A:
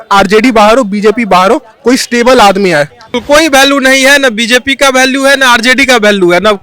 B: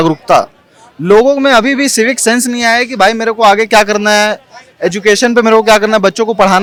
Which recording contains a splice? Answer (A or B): A